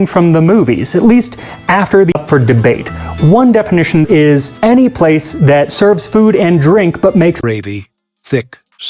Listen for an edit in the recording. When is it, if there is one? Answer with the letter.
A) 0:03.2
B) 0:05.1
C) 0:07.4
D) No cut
C